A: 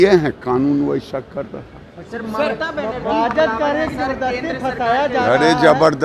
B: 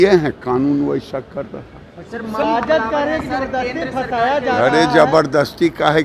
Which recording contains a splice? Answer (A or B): B